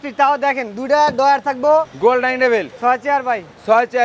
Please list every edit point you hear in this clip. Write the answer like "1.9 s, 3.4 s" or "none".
1.9 s